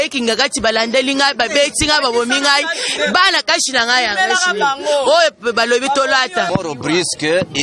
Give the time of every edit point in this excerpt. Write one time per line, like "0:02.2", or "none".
0:06.5